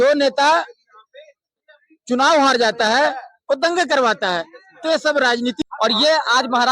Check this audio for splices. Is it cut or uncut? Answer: cut